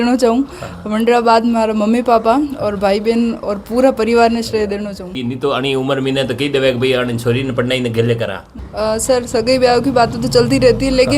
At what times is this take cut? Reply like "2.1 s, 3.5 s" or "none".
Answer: 5.2 s, 8.6 s